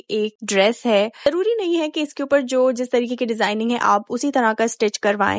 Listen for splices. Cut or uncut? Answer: cut